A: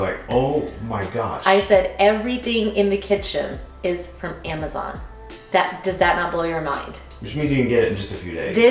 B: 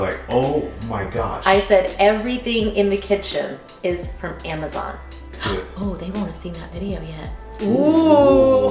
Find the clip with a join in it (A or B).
B